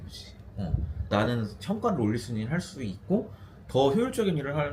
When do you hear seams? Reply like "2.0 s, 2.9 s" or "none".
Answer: 1.1 s